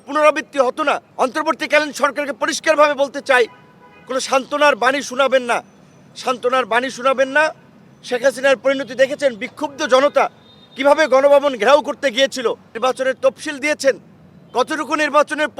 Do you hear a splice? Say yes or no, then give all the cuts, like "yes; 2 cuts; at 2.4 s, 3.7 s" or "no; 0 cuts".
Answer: yes; 2 cuts; at 1.1 s, 12.7 s